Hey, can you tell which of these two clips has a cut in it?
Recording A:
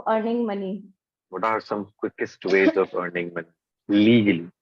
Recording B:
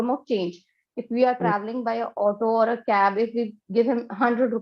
A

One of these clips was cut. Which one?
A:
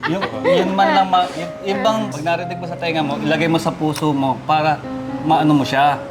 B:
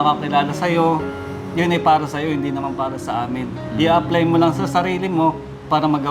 A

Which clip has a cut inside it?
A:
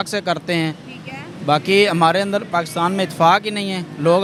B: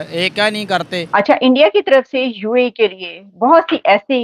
B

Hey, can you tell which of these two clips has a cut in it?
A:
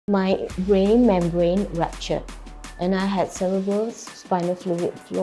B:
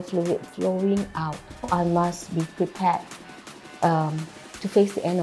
B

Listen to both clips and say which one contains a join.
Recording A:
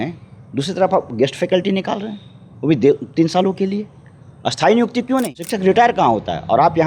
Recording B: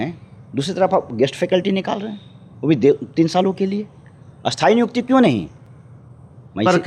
A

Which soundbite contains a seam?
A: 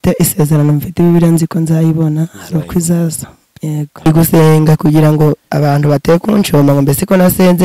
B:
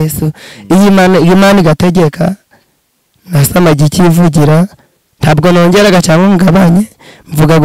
A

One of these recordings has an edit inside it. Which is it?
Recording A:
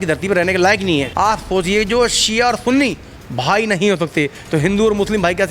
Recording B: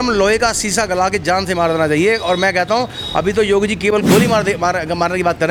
A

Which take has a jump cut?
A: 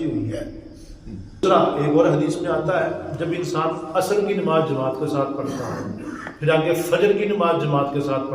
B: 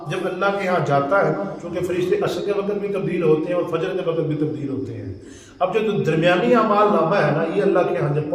A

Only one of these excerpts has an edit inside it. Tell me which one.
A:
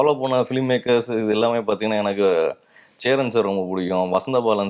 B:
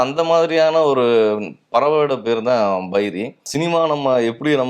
B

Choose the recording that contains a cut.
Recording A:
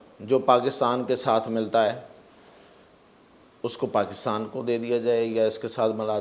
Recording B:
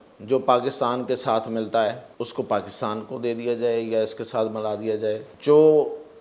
B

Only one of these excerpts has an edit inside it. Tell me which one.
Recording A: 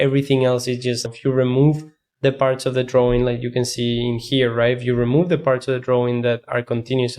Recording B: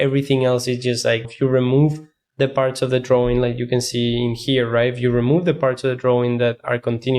A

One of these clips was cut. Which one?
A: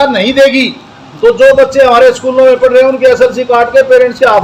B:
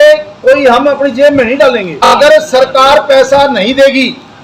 B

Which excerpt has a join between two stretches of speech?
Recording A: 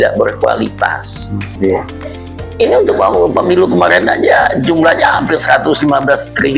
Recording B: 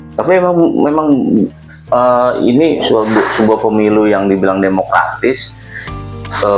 A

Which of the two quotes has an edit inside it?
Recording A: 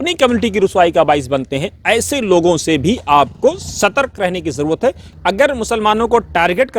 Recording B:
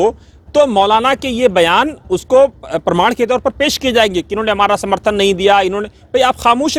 A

